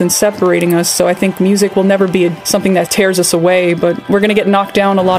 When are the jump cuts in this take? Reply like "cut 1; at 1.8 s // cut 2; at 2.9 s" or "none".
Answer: cut 1; at 4.1 s